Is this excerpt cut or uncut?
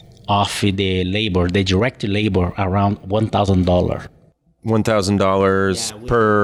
uncut